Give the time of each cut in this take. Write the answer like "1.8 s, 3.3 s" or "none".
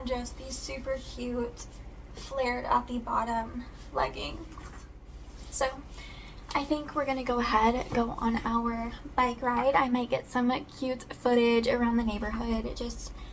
none